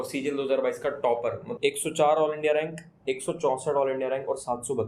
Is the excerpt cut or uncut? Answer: cut